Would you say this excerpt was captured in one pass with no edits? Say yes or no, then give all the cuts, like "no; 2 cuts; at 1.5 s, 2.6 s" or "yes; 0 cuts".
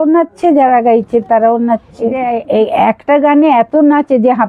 no; 1 cut; at 2.2 s